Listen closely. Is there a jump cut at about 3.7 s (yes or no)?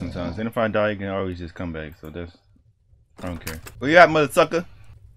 yes